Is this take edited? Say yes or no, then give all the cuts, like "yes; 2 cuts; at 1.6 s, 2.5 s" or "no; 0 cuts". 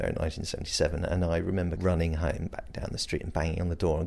yes; 1 cut; at 1.8 s